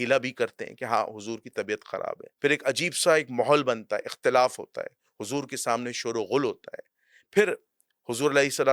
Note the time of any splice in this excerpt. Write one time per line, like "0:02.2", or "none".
0:02.3